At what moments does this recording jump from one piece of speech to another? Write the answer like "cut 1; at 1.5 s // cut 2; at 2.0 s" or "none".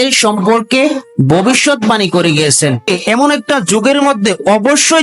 cut 1; at 2.9 s